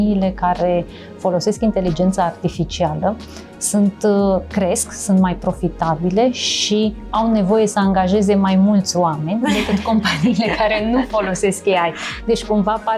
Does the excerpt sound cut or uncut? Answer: uncut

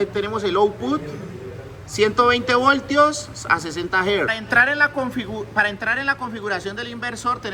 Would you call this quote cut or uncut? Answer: cut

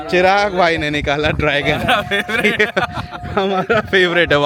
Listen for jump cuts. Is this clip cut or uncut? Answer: uncut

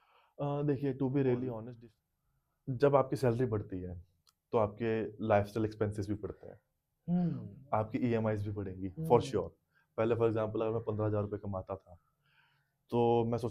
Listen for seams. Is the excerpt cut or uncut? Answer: cut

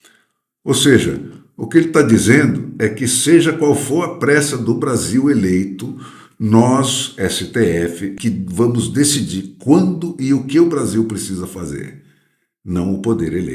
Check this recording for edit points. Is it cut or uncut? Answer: cut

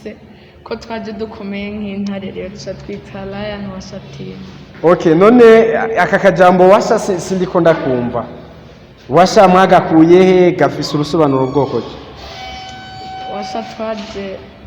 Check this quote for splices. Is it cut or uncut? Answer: uncut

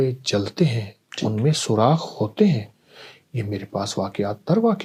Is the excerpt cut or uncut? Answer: uncut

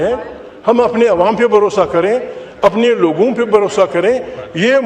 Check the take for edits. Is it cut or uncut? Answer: uncut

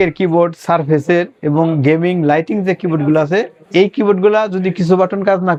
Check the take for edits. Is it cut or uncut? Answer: uncut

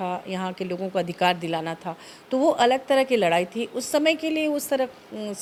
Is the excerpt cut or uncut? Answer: uncut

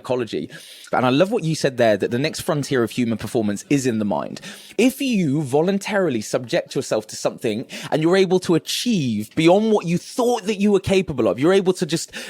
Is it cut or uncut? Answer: cut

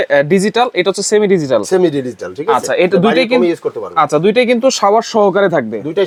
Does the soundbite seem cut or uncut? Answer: uncut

